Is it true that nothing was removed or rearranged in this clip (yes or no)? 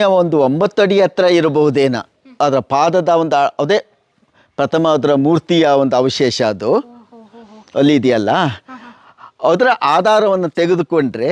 yes